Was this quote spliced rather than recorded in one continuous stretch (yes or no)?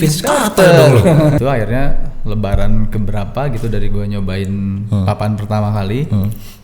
yes